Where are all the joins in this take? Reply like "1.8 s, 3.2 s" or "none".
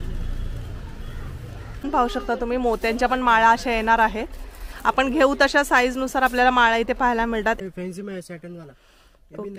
1.9 s, 7.6 s